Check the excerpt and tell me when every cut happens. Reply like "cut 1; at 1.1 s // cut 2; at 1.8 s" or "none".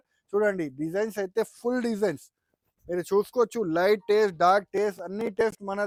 none